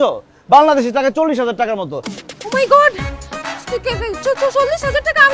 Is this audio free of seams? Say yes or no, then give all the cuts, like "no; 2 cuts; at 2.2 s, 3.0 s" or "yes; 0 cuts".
no; 1 cut; at 2.0 s